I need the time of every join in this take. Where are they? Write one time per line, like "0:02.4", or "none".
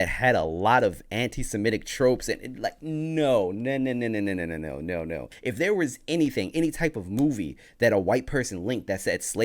0:05.3